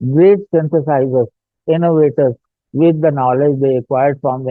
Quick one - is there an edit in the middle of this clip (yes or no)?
no